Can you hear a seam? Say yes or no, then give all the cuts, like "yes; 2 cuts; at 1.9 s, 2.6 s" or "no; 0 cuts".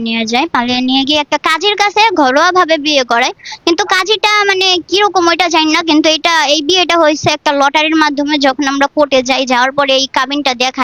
no; 0 cuts